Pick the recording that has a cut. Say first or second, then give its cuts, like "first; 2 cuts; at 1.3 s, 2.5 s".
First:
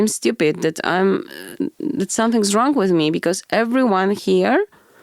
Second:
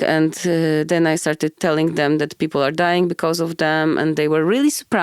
second; 1 cut; at 1.6 s